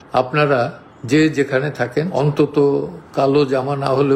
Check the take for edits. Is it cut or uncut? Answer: cut